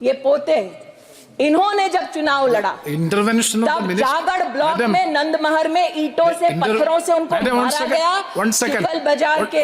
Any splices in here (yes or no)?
no